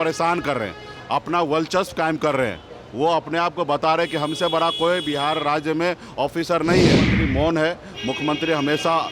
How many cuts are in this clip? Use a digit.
1